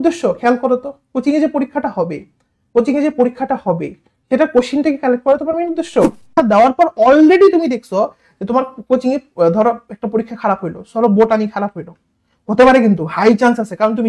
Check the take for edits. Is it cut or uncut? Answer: cut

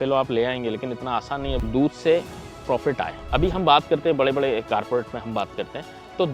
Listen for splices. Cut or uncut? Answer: cut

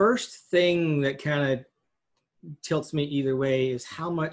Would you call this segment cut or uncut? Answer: uncut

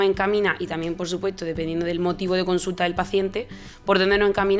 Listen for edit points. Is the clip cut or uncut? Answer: uncut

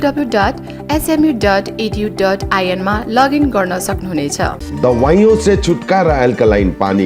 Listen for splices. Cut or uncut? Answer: cut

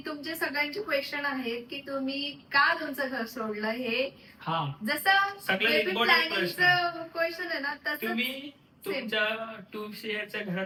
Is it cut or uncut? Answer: uncut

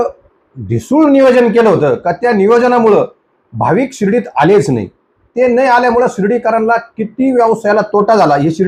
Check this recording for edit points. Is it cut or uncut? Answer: uncut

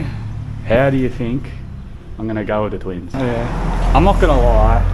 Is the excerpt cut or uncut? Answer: cut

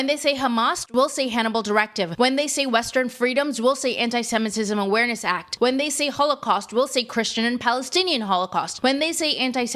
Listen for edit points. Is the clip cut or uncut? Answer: cut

